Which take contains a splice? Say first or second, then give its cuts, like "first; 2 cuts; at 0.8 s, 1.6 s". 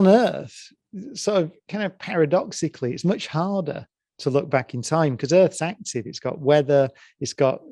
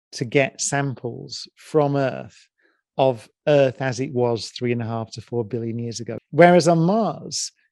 second; 1 cut; at 6.2 s